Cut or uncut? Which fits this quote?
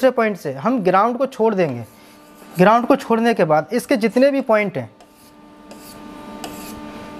uncut